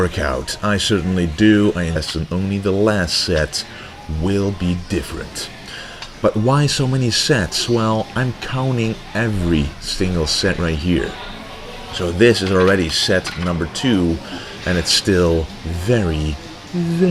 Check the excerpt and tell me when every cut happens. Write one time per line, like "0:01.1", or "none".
none